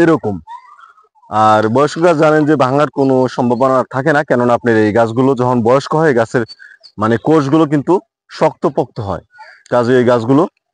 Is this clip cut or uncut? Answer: uncut